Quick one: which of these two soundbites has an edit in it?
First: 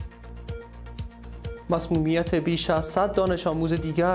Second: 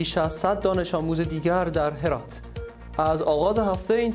first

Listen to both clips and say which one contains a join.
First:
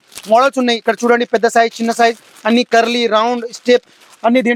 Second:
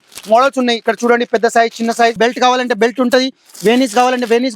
second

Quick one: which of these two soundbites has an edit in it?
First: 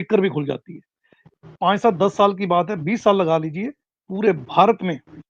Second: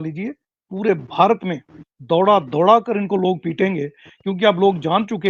first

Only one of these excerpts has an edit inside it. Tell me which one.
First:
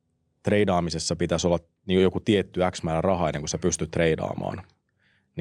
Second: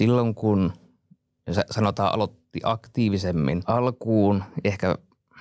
second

